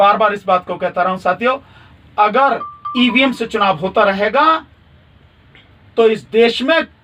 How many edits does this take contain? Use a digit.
0